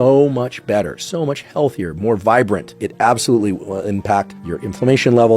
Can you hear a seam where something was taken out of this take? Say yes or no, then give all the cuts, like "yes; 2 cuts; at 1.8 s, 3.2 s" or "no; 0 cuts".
yes; 1 cut; at 2.8 s